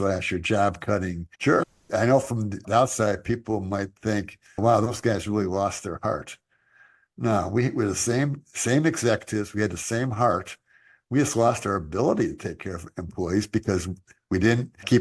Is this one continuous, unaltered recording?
no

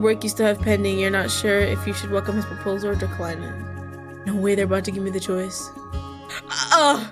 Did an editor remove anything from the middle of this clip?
no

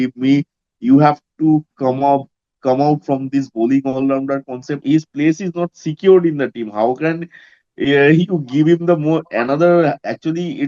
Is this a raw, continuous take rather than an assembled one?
no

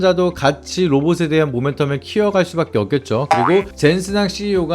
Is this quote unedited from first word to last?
no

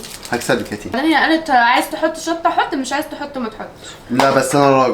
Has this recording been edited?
yes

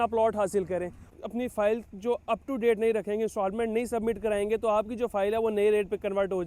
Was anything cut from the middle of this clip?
yes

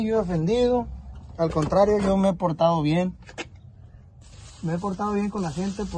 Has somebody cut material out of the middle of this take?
no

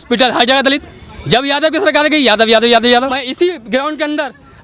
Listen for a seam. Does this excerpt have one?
yes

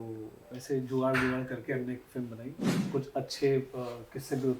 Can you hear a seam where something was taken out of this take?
yes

